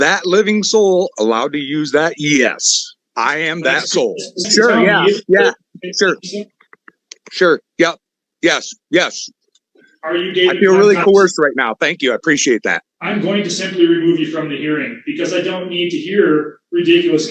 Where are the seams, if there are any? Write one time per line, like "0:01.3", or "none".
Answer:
0:04.5
0:12.9